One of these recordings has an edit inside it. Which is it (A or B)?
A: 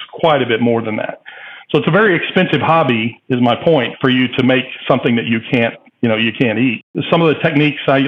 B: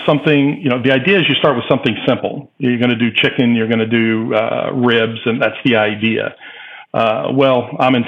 A